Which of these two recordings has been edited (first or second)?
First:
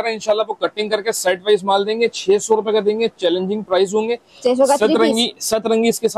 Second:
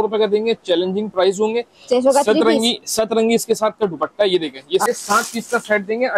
second